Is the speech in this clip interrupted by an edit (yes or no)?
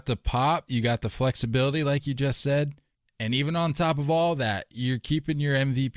no